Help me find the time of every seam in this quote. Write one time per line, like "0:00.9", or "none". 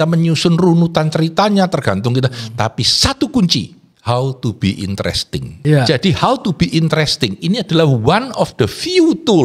0:03.8
0:05.5

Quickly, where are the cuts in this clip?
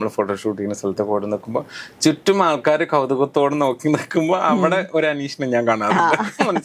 none

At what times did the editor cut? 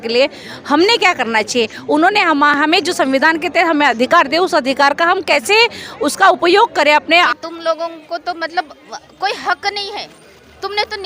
0:07.0

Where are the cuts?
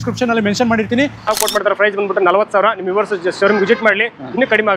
0:01.3

